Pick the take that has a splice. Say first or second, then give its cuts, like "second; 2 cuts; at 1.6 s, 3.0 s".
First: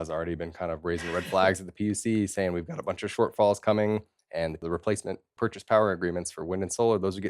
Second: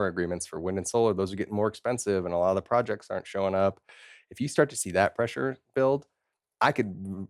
first; 2 cuts; at 3.1 s, 4.7 s